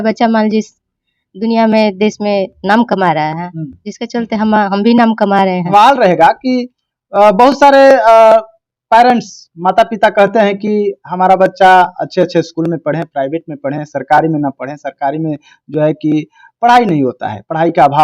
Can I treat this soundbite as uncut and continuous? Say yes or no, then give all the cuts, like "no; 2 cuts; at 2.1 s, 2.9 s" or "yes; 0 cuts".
no; 1 cut; at 5.7 s